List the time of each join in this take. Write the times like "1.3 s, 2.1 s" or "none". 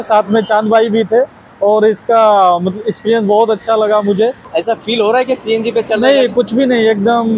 4.4 s